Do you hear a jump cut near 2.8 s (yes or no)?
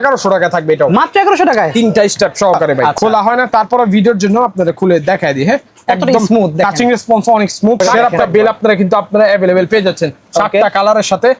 yes